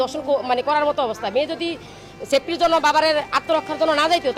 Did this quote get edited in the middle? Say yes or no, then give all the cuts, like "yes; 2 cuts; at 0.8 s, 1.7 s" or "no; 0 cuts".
no; 0 cuts